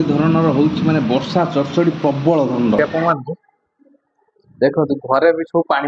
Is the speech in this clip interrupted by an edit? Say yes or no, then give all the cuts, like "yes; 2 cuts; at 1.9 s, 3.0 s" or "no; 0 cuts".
yes; 1 cut; at 2.8 s